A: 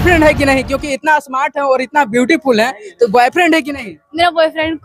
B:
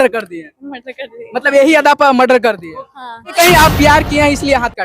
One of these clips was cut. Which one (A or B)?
B